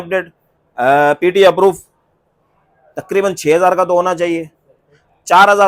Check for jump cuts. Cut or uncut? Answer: uncut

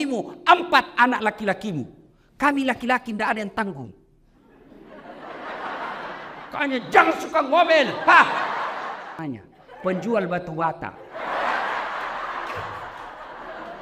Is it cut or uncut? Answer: cut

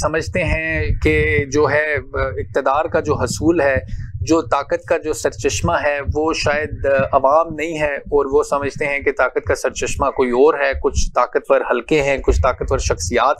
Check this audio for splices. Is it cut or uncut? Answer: uncut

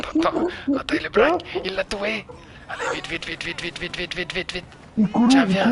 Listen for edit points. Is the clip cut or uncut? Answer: uncut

